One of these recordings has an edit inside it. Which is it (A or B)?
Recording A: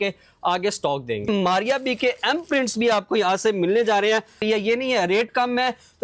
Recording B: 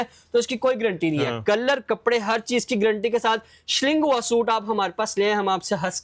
A